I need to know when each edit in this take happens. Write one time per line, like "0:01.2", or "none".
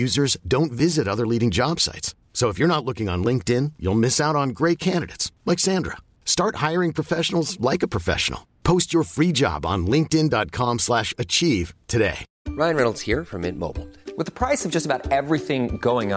0:12.3